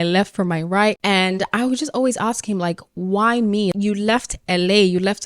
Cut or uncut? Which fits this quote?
uncut